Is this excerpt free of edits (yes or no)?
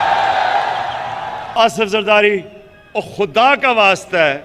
no